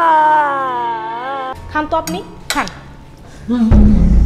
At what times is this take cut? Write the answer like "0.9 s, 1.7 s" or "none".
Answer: 1.5 s